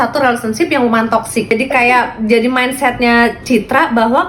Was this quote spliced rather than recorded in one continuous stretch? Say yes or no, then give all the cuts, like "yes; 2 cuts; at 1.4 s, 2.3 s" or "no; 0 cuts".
yes; 1 cut; at 1.5 s